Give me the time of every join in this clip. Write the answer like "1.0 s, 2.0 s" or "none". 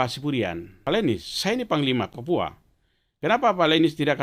0.8 s, 2.1 s